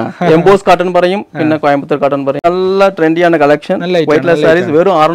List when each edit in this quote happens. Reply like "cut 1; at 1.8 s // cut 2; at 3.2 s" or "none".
cut 1; at 2.5 s

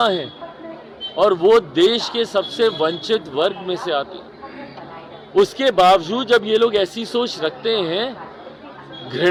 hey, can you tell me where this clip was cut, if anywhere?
none

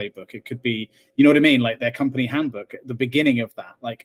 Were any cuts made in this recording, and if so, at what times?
none

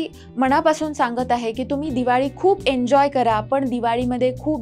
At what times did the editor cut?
none

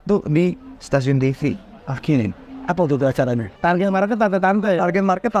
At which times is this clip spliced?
cut 1; at 3.5 s

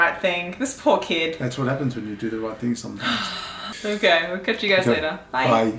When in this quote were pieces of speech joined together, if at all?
none

